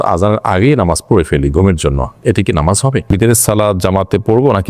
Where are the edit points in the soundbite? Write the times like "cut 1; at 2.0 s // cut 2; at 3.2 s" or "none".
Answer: cut 1; at 3.1 s